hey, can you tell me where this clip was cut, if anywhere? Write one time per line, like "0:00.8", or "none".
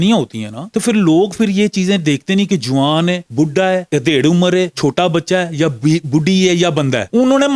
none